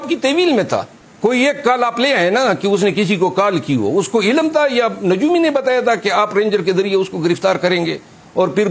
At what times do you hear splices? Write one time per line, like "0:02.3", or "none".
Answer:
0:01.0